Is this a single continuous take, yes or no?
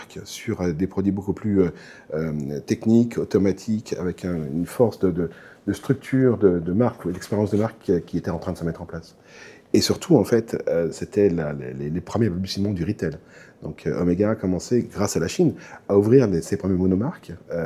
yes